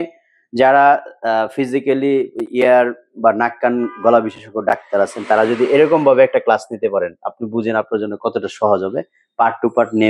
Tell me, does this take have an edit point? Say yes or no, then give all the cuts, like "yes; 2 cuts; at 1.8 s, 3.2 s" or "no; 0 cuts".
no; 0 cuts